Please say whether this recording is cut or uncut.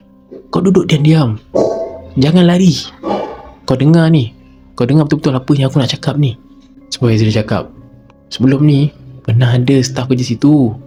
uncut